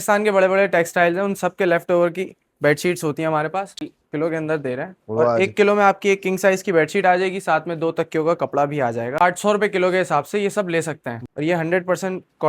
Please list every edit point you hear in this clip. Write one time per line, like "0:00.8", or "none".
0:03.7
0:09.2
0:11.2